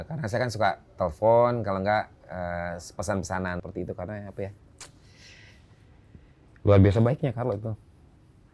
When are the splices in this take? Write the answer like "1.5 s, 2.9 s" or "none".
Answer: 3.6 s